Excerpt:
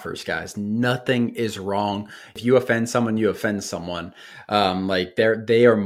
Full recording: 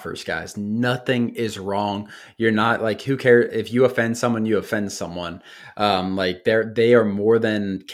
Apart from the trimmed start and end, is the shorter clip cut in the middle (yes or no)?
yes